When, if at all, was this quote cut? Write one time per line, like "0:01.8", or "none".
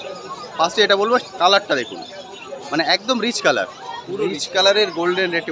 none